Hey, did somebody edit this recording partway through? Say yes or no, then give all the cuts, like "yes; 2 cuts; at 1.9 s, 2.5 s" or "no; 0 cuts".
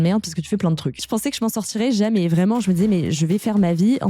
yes; 2 cuts; at 1.1 s, 3.2 s